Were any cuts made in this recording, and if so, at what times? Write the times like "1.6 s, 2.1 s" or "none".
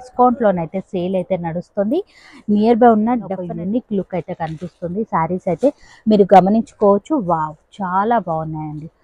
3.4 s